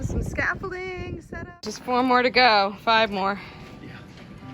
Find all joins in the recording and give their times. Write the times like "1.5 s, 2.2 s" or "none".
1.6 s